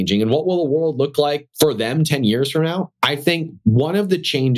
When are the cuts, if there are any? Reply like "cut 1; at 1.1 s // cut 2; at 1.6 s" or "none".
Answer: cut 1; at 1.5 s